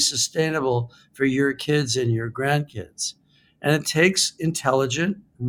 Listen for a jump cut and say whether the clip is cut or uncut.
uncut